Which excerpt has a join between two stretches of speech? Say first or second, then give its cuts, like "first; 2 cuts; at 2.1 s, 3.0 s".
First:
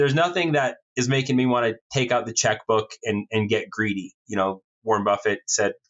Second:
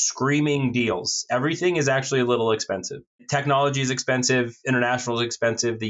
second; 1 cut; at 3.2 s